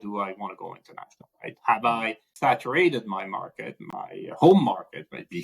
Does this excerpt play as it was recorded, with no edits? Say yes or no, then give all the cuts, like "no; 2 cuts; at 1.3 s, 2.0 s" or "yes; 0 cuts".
no; 2 cuts; at 2.2 s, 3.7 s